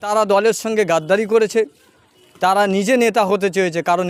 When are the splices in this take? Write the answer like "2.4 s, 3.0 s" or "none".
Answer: none